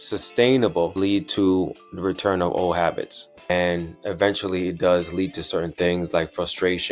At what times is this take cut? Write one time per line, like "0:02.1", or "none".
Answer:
0:00.9
0:03.4